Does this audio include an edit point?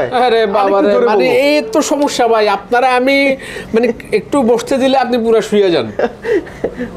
no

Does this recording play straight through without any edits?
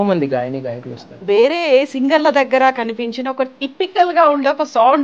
no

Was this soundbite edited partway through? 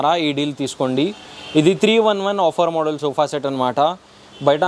no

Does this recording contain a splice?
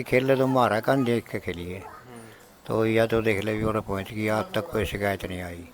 no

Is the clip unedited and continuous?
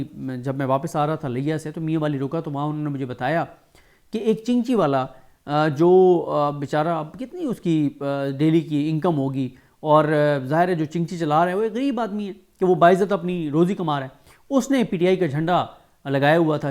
yes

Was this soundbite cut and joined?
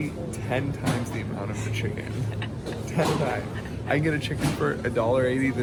no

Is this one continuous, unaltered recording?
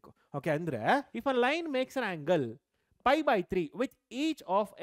no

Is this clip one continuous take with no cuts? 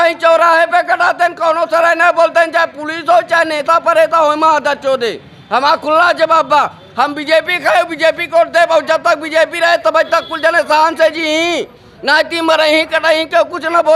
yes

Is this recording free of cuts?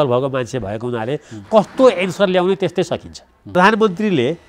no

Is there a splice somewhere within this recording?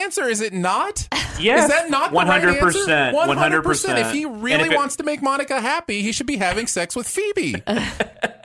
no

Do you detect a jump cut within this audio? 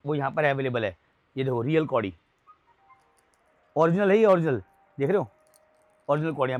no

